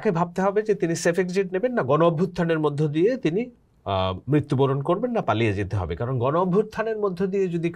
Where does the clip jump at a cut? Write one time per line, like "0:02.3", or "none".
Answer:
none